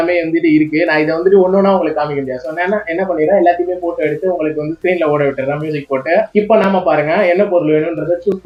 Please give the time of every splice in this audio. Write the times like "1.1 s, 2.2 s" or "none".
none